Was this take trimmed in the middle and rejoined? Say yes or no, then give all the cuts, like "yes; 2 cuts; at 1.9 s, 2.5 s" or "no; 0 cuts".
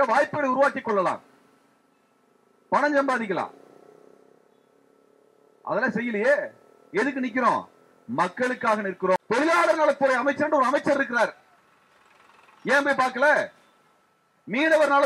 yes; 1 cut; at 9.2 s